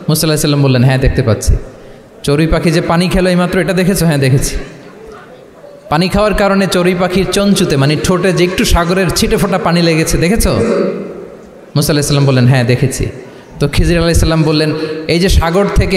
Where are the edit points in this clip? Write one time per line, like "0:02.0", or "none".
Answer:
none